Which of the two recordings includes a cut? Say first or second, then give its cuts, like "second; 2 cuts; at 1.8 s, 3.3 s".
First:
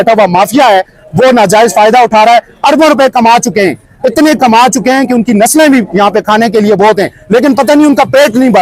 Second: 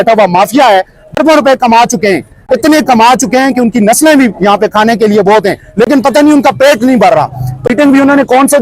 second; 2 cuts; at 1.0 s, 7.6 s